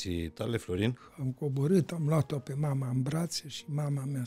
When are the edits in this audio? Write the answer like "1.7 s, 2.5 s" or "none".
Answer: 1.0 s

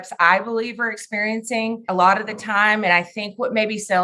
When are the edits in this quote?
1.8 s

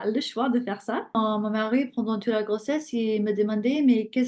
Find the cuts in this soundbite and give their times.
1.2 s

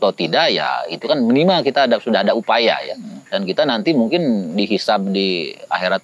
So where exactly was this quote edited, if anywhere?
none

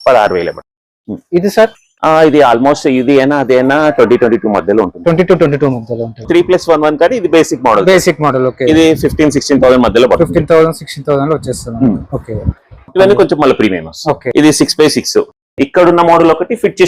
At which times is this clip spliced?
6.2 s, 12.8 s

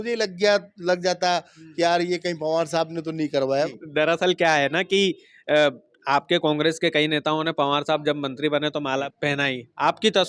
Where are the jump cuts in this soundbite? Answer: 3.7 s, 9.1 s

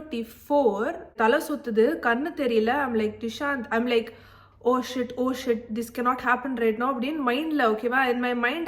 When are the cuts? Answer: 1.2 s

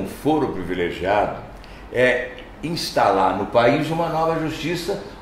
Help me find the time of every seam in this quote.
none

